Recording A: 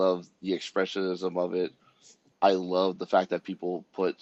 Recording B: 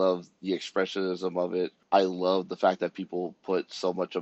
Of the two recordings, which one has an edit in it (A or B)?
B